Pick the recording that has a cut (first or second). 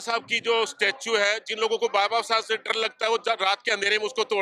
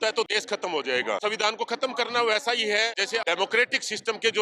second